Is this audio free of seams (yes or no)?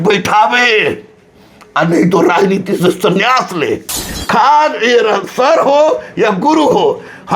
no